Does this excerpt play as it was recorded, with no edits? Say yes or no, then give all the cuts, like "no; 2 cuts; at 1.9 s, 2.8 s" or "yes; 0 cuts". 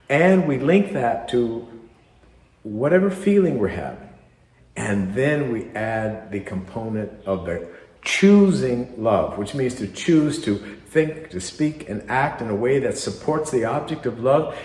yes; 0 cuts